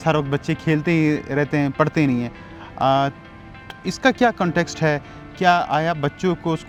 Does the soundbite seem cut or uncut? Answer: uncut